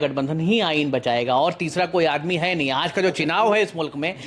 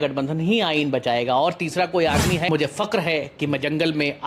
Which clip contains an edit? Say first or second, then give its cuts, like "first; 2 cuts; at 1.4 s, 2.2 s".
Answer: second; 1 cut; at 2.5 s